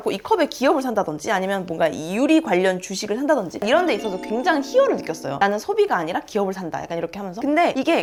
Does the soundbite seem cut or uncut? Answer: uncut